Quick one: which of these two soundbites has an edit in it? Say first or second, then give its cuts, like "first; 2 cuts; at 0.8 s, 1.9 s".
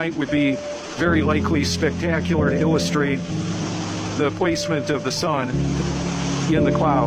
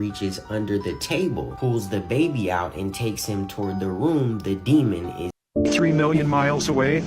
second; 1 cut; at 5.2 s